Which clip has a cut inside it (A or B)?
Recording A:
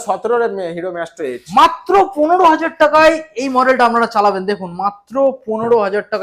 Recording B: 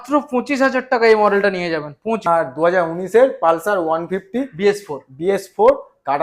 B